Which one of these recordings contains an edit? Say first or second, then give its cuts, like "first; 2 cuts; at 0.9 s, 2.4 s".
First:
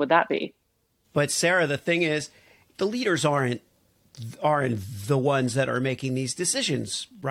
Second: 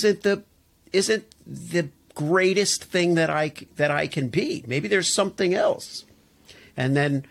first; 2 cuts; at 0.9 s, 2.7 s